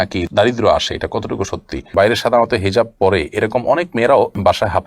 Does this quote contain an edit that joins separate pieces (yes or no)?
yes